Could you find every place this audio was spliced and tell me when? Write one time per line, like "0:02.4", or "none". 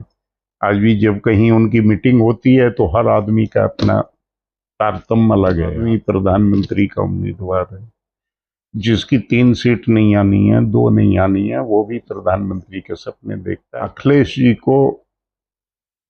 0:05.8
0:13.6